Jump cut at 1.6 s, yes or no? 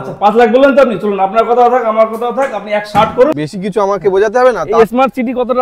no